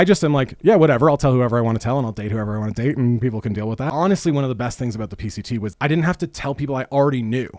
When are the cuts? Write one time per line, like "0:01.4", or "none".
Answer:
0:03.8
0:05.7